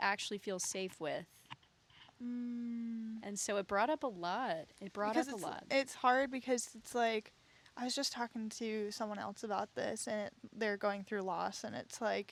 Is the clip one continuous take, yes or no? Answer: yes